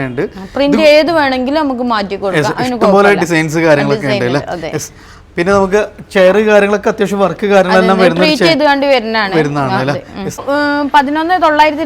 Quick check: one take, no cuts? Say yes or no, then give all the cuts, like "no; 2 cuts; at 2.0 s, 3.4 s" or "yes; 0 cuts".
no; 1 cut; at 10.4 s